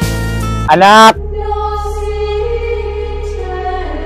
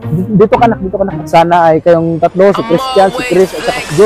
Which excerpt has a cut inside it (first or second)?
second